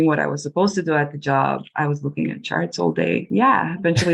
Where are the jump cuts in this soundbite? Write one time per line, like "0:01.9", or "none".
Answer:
0:03.2

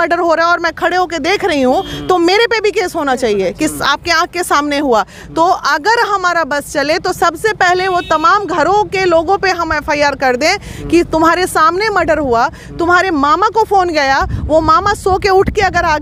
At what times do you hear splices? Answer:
none

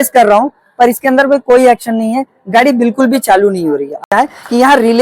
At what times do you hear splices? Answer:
0:04.1

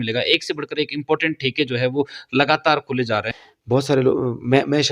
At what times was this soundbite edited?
0:03.3

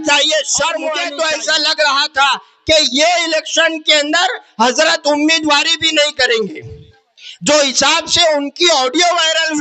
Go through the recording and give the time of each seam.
0:01.0

